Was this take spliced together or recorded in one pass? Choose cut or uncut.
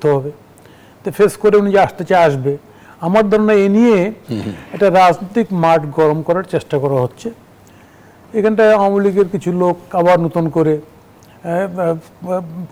uncut